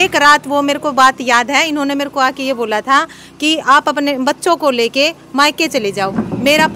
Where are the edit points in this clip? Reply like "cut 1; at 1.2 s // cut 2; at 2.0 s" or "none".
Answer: none